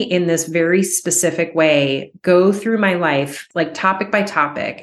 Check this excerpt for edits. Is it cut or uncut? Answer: cut